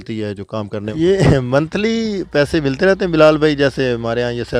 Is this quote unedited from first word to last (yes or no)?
no